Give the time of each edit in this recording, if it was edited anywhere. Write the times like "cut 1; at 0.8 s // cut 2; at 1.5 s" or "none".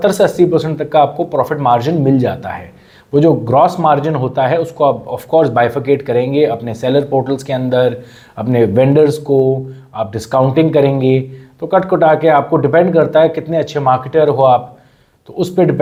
none